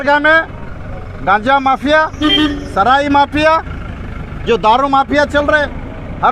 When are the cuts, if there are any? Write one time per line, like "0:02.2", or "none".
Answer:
none

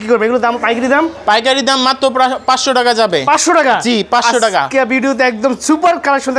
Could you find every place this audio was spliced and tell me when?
none

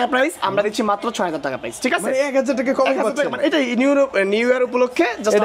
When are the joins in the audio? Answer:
none

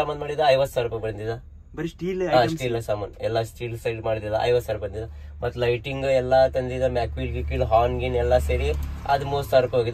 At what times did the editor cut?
none

